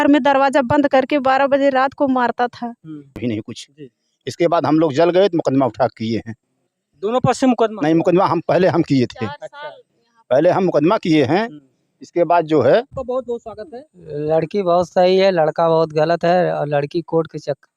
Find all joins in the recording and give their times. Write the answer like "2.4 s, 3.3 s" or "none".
3.2 s, 12.9 s